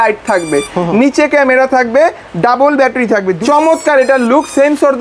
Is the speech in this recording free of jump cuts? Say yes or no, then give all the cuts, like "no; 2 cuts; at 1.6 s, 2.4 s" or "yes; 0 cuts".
no; 1 cut; at 3.4 s